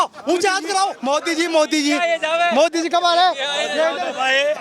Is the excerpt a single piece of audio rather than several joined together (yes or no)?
no